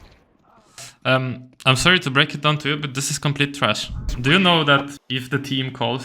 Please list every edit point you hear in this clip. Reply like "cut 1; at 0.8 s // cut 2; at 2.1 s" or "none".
cut 1; at 4.1 s // cut 2; at 5.0 s